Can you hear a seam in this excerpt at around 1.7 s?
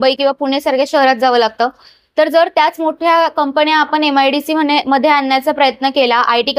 no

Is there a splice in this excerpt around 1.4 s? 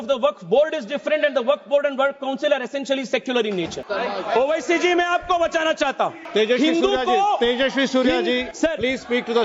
no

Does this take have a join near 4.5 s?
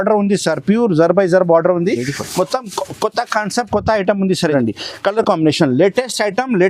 yes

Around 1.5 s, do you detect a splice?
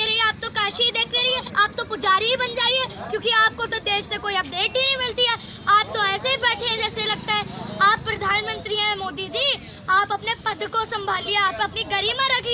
yes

